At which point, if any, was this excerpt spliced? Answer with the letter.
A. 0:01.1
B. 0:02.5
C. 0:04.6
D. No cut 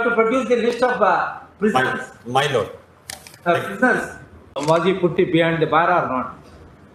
C